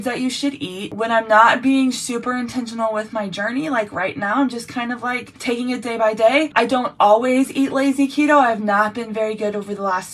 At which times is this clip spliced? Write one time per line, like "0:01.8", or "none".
0:00.9
0:05.3
0:06.5